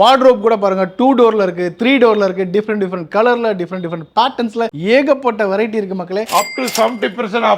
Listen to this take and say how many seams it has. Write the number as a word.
one